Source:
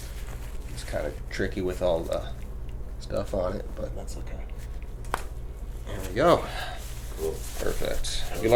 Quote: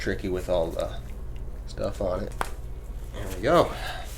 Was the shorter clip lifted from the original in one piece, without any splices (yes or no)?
no